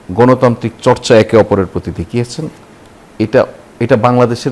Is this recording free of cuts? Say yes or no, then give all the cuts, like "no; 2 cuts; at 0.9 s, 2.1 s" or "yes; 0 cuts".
yes; 0 cuts